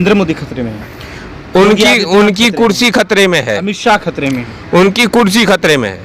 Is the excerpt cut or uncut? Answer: uncut